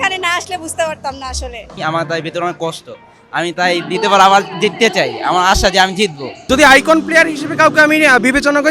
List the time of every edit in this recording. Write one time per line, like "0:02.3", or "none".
0:01.7
0:06.5